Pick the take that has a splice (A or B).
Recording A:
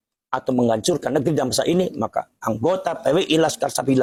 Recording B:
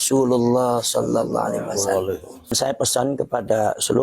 B